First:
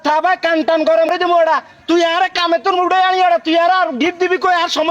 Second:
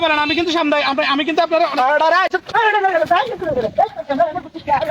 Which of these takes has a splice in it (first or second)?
first